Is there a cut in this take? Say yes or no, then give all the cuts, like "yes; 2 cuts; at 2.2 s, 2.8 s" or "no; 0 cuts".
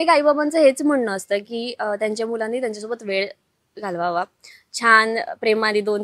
no; 0 cuts